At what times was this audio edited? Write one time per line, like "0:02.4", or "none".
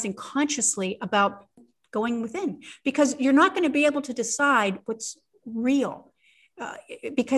0:01.6